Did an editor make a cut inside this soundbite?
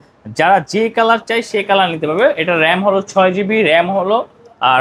no; 0 cuts

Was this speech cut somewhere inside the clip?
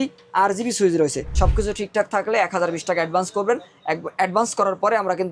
yes; 1 cut; at 1.3 s

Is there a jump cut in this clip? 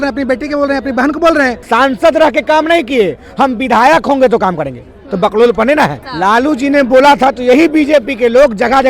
yes; 2 cuts; at 1.6 s, 6.0 s

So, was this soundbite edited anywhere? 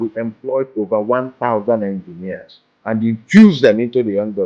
no; 0 cuts

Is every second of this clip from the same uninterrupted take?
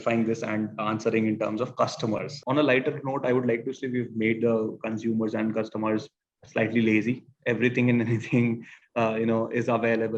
no; 1 cut; at 2.3 s

